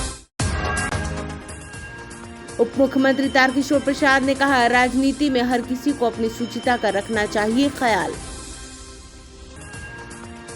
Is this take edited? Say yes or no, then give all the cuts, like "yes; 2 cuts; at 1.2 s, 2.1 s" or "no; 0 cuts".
no; 0 cuts